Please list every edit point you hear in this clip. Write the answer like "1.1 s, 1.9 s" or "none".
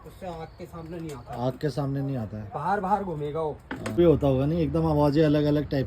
4.0 s